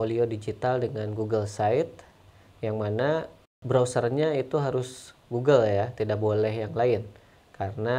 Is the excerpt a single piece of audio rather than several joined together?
no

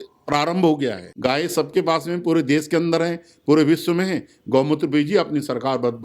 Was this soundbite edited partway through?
yes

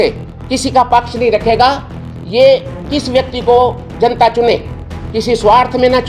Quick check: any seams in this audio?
no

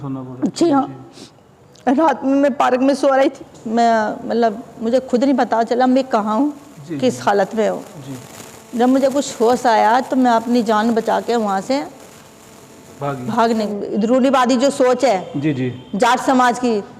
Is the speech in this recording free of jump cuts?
no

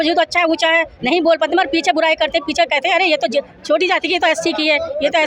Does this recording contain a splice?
no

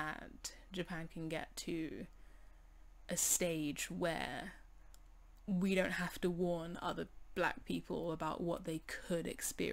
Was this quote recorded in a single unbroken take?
yes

